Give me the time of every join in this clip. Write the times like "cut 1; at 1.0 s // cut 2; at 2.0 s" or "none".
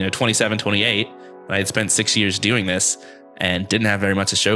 none